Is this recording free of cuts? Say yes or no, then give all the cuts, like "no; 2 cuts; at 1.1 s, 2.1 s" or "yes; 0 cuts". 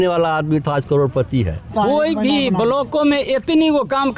no; 1 cut; at 1.7 s